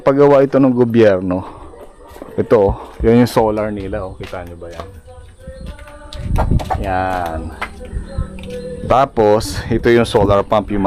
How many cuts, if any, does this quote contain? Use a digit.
0